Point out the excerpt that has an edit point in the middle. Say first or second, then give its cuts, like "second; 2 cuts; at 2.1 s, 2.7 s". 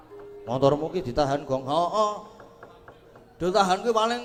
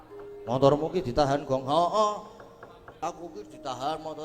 second; 1 cut; at 2.9 s